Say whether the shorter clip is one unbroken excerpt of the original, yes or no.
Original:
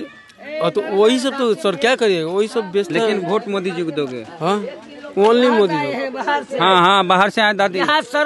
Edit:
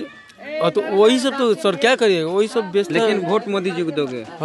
yes